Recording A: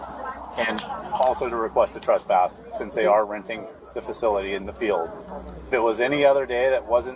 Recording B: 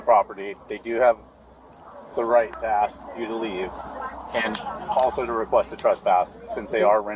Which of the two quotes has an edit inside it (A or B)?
A